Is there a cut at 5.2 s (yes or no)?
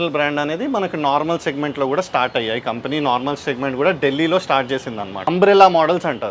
yes